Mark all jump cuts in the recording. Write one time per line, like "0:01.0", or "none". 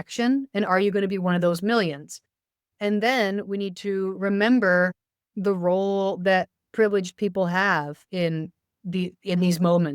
0:05.3